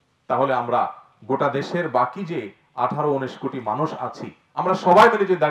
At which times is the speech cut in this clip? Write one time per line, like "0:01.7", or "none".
none